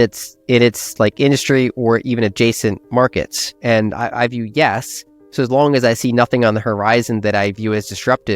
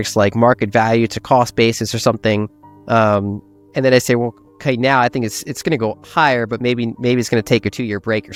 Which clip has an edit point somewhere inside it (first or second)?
first